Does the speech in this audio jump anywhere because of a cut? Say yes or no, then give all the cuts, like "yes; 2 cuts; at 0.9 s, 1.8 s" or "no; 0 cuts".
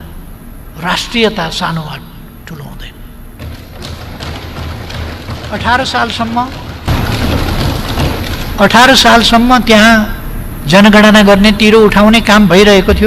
yes; 1 cut; at 5.3 s